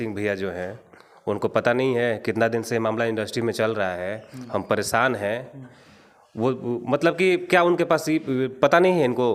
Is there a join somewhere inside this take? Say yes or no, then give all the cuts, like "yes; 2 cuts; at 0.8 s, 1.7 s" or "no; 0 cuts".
no; 0 cuts